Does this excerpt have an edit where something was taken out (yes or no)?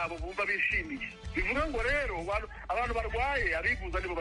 yes